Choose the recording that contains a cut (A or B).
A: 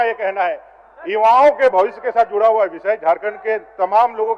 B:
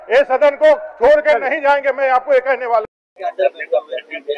B